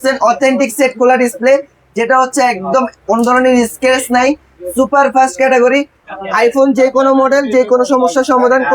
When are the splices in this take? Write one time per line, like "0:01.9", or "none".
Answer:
0:06.0